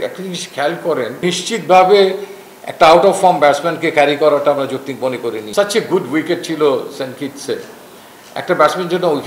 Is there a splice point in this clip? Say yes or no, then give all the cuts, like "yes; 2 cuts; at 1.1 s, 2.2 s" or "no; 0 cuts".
yes; 2 cuts; at 1.2 s, 5.4 s